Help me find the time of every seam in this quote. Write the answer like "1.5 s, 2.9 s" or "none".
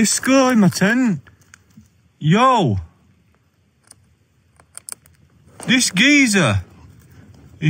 none